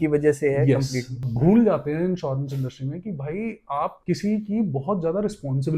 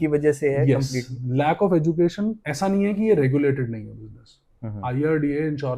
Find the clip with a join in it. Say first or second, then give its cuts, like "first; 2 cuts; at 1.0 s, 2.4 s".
first; 2 cuts; at 1.2 s, 4.0 s